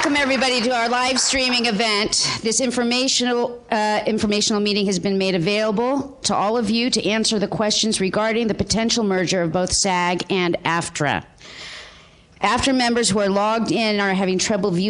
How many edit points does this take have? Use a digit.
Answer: 1